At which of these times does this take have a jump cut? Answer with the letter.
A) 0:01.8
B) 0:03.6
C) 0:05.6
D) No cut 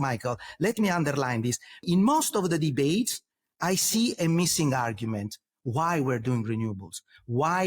A